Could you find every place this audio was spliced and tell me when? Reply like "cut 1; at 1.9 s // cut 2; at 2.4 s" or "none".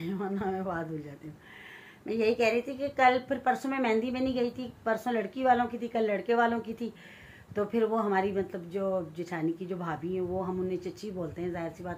none